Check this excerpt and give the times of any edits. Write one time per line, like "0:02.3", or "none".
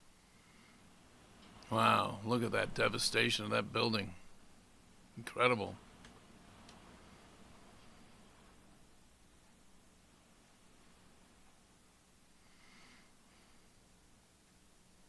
none